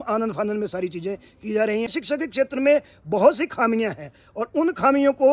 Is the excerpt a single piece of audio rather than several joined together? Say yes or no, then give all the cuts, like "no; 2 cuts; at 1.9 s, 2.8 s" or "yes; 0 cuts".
no; 1 cut; at 1.9 s